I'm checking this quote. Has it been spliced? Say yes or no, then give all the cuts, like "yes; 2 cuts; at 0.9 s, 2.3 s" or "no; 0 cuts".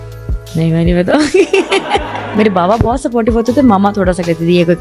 yes; 1 cut; at 2.3 s